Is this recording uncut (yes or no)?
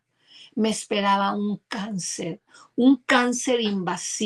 yes